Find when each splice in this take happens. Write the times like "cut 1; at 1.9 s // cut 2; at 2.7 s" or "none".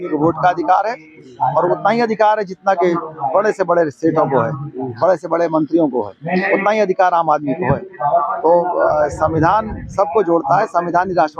none